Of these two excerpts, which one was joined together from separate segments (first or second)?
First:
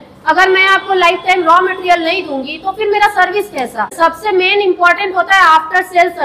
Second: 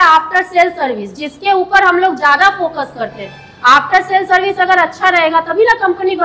first